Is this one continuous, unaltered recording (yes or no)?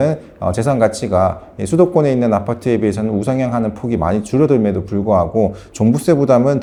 yes